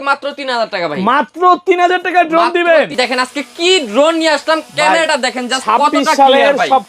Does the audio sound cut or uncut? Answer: cut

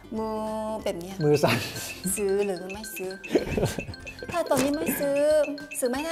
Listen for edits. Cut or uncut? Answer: uncut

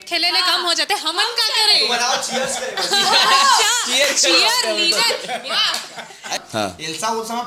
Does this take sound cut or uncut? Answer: cut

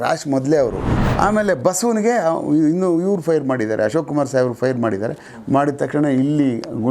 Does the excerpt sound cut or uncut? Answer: cut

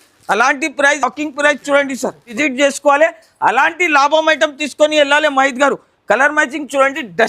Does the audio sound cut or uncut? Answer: cut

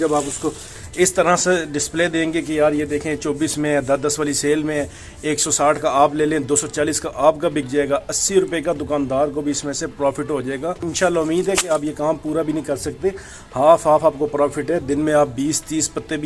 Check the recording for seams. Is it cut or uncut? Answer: cut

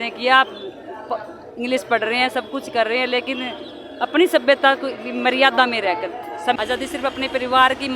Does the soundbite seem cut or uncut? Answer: cut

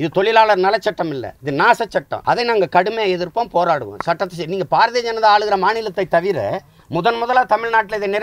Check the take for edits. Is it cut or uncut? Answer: cut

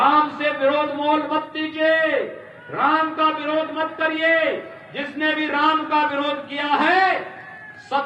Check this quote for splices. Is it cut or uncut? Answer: uncut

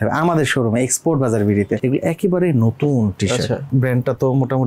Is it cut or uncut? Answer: cut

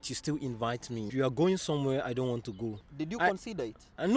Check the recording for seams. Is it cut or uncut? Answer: cut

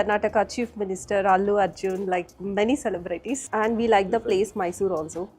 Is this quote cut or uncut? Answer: cut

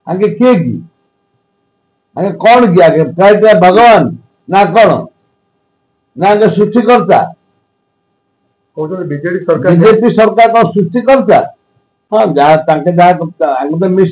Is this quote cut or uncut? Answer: uncut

